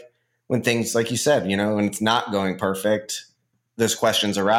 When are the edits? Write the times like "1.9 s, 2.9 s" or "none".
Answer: none